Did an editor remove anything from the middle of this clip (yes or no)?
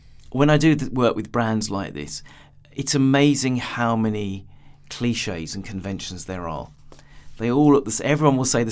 no